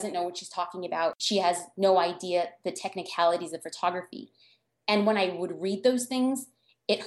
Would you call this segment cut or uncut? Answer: cut